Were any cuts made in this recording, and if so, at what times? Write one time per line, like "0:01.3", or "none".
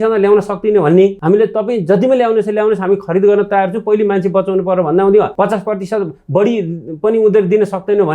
0:01.2
0:05.3